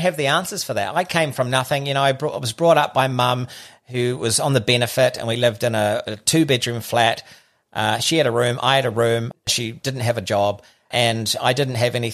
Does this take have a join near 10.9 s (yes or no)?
yes